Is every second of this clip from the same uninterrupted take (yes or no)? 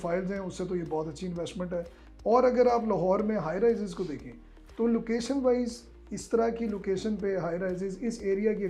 yes